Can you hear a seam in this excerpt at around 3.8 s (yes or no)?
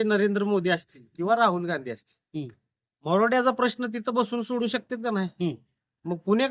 no